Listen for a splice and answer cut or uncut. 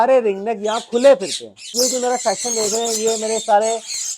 cut